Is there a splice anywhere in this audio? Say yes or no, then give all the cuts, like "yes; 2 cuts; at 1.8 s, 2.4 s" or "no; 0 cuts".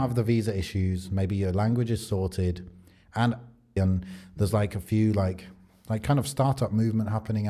yes; 1 cut; at 3.8 s